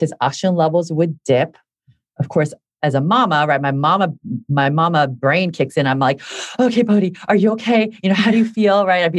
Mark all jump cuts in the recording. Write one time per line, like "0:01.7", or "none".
none